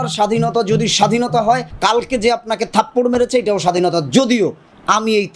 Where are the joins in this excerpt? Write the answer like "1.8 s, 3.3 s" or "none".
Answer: 1.7 s